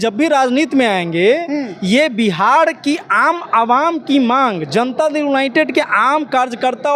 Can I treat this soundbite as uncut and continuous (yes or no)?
yes